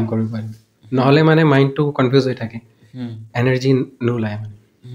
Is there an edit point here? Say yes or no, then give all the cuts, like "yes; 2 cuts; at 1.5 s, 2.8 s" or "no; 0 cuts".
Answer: no; 0 cuts